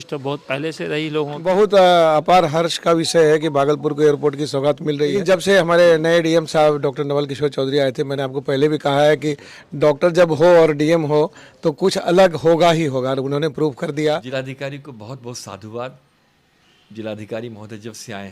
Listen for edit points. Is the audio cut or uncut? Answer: cut